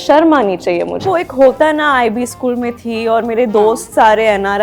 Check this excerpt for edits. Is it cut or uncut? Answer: cut